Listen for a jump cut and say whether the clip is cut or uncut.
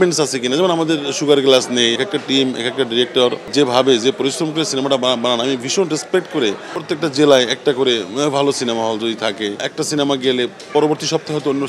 cut